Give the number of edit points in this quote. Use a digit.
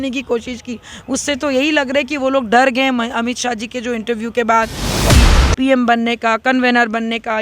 1